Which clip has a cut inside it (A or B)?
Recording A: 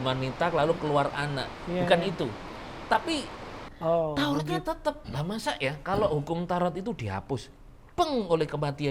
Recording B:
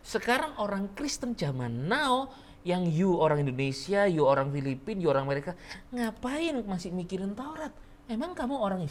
A